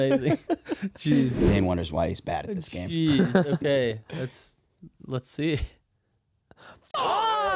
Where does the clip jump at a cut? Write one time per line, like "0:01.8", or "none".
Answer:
0:01.4